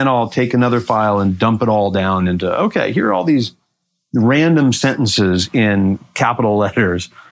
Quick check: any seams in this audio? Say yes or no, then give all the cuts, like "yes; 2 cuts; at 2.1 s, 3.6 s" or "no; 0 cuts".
no; 0 cuts